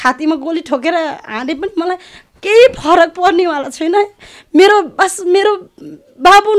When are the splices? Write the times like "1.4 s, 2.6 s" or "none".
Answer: none